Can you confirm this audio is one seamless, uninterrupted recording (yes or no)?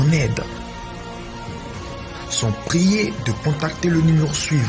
yes